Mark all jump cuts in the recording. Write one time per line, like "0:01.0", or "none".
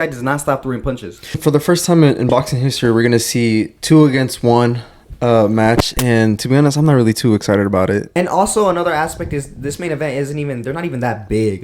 0:01.4
0:08.1